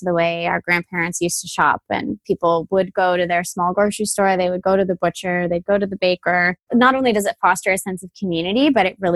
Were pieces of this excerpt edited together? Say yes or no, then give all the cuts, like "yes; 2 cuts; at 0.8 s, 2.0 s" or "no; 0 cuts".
yes; 1 cut; at 2.2 s